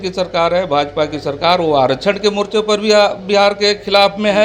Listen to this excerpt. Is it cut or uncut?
uncut